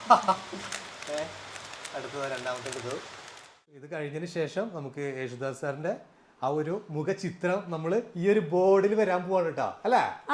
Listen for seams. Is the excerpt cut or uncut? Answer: cut